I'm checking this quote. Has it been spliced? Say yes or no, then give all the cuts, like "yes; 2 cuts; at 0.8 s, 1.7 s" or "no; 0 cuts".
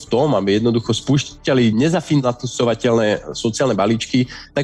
yes; 1 cut; at 2.2 s